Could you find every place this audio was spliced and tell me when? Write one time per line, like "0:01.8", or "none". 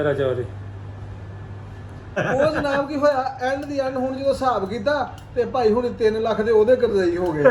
0:02.2